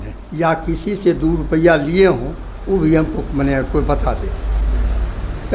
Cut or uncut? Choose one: uncut